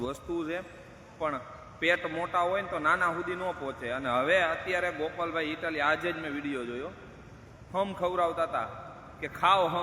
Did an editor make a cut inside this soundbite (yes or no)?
no